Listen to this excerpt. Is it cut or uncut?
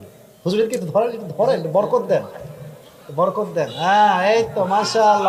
uncut